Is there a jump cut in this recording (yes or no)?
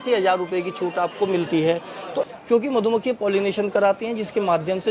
yes